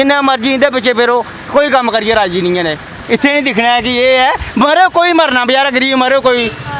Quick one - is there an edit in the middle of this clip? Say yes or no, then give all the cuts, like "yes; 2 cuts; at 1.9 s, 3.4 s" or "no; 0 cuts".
yes; 1 cut; at 2.9 s